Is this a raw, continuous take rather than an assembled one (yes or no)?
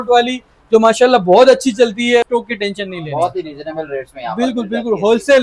no